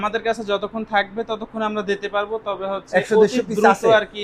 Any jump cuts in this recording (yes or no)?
no